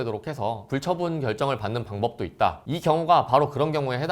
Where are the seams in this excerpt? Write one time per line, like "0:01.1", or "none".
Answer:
0:02.6

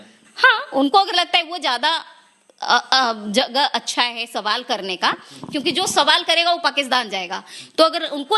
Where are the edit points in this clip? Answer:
none

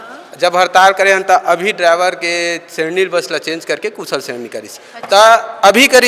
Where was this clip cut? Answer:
none

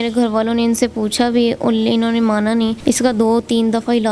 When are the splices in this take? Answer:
0:02.8

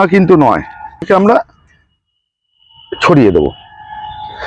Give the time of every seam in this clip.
0:01.1

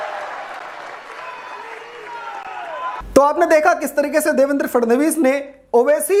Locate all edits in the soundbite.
none

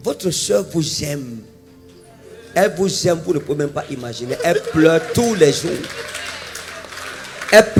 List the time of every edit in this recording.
none

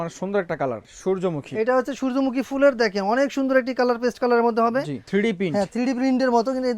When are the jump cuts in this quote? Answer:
0:00.9
0:05.0

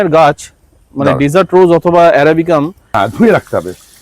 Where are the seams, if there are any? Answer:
0:02.9

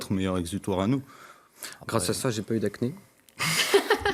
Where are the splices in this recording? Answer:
none

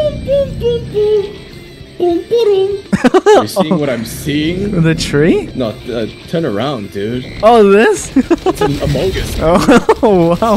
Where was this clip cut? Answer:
0:02.8
0:05.5
0:08.1

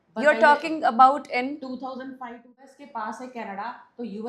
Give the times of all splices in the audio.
0:02.7

